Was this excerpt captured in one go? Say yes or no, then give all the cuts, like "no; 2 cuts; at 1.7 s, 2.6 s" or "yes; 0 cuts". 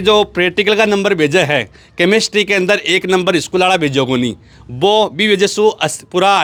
yes; 0 cuts